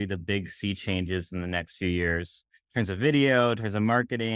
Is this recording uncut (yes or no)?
no